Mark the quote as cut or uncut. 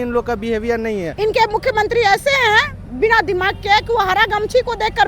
cut